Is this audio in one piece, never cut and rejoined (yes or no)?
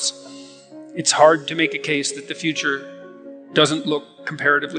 yes